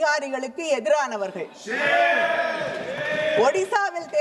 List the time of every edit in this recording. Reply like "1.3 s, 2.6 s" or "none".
none